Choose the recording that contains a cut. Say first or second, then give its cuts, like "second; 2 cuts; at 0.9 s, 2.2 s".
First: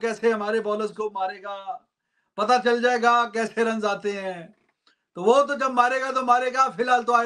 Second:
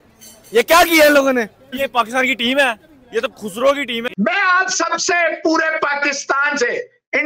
second; 2 cuts; at 1.8 s, 4.0 s